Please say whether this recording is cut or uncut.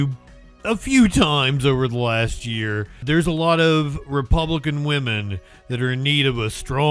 cut